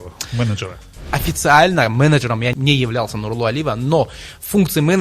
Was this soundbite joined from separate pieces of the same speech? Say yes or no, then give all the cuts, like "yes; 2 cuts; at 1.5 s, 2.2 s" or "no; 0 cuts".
yes; 2 cuts; at 1.0 s, 2.6 s